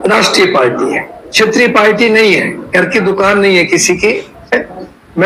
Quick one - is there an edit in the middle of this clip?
no; 0 cuts

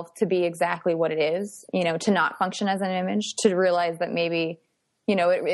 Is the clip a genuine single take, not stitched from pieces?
yes; 0 cuts

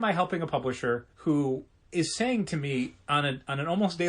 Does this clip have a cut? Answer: yes; 2 cuts; at 1.1 s, 1.8 s

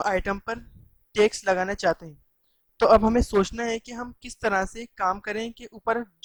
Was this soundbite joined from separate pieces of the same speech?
no; 0 cuts

